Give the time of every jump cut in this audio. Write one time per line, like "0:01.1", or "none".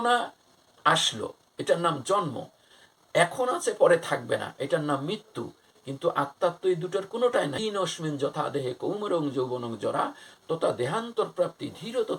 0:07.6